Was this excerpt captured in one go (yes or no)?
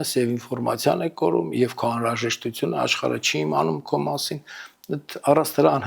yes